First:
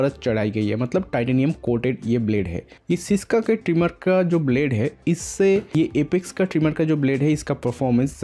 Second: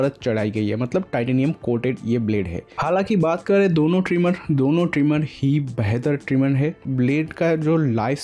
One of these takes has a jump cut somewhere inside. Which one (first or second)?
second